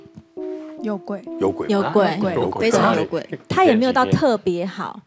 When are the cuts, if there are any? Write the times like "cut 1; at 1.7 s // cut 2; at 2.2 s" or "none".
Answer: cut 1; at 3.5 s